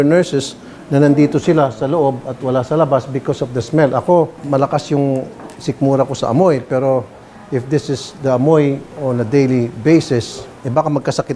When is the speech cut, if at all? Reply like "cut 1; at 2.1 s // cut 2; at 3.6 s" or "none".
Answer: none